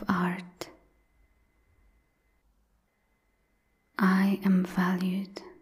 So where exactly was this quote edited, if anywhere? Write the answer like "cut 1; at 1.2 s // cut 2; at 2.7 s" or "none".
none